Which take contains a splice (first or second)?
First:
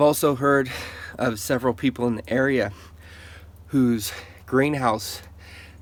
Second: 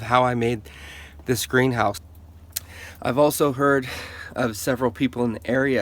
second